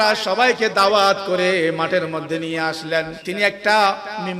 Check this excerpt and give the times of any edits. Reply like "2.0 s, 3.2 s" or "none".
3.2 s